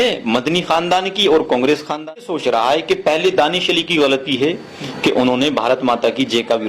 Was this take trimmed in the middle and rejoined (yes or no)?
yes